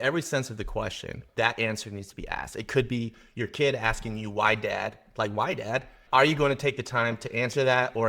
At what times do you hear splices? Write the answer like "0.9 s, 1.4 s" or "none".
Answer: 1.2 s, 6.0 s